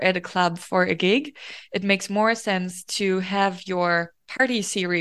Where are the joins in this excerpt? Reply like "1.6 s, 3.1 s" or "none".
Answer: none